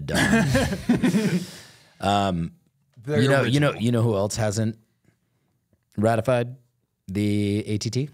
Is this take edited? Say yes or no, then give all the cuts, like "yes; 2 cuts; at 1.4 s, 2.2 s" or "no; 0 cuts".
no; 0 cuts